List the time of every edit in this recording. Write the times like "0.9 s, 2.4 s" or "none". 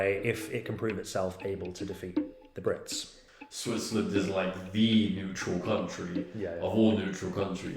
3.2 s